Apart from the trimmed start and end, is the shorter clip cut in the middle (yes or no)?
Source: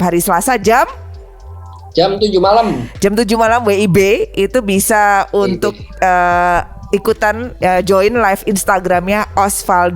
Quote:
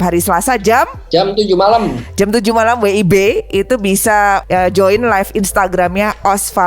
yes